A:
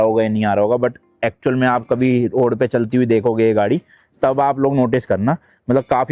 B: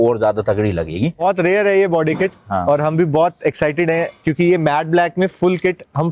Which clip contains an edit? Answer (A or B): B